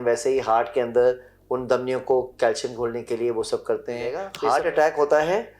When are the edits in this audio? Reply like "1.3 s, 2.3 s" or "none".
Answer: 4.3 s